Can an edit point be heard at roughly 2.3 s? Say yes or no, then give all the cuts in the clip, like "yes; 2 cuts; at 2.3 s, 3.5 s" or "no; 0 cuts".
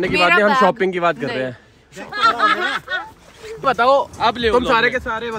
no; 1 cut; at 3.7 s